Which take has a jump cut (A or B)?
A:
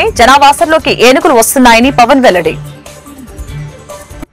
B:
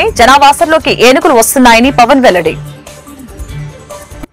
A